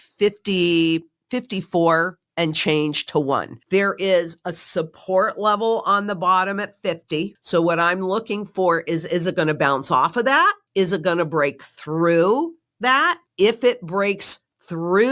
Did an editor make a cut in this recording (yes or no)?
yes